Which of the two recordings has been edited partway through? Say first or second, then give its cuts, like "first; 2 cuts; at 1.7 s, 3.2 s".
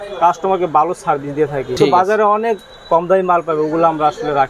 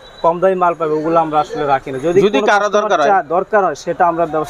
first; 1 cut; at 1.8 s